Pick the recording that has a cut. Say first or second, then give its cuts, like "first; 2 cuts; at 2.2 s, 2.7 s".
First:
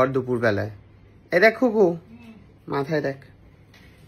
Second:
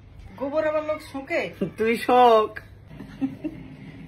second; 1 cut; at 3.0 s